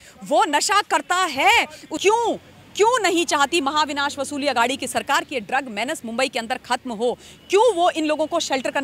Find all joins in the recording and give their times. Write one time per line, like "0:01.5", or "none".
0:01.9